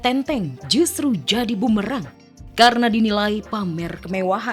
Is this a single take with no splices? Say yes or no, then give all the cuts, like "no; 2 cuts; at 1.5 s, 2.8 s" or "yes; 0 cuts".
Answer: yes; 0 cuts